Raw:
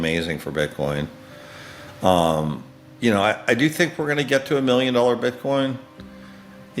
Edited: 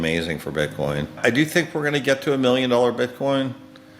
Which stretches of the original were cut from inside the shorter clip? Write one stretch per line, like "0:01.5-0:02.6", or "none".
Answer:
0:01.2-0:03.4